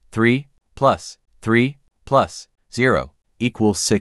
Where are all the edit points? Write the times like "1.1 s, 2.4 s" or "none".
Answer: none